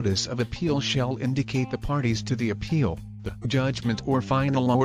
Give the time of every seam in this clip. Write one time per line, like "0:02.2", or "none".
0:03.4